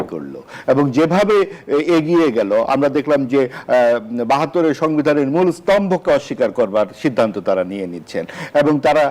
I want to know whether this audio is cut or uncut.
uncut